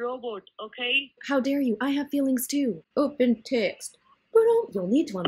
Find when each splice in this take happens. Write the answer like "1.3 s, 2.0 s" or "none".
1.2 s, 2.8 s